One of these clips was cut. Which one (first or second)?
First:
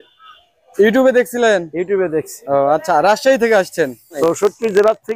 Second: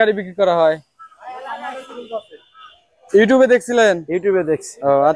first